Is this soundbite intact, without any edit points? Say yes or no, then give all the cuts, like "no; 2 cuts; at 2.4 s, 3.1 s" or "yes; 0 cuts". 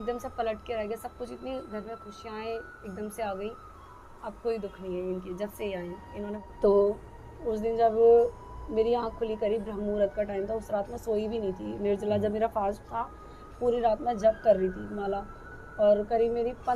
no; 1 cut; at 6.4 s